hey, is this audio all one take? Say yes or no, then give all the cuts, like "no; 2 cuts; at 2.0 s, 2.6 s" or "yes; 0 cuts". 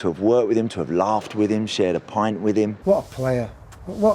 no; 1 cut; at 2.8 s